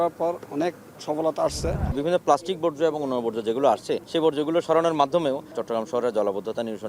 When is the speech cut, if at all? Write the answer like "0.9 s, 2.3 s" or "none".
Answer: 1.9 s, 4.0 s, 5.5 s